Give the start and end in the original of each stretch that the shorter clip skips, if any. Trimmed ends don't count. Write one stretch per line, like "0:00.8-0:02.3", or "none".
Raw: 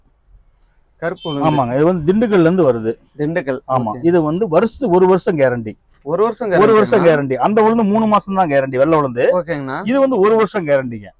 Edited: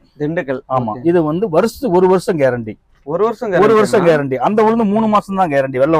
none